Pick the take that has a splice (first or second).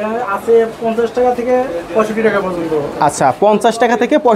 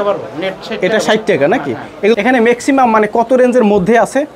second